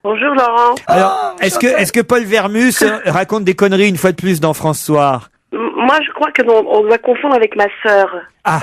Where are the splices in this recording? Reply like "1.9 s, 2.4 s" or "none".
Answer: 1.4 s